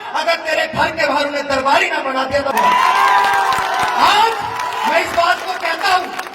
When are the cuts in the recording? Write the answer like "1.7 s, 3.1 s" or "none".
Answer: 2.5 s